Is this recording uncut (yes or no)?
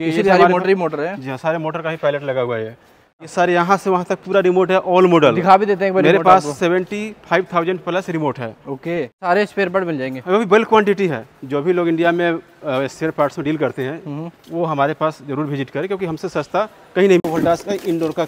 no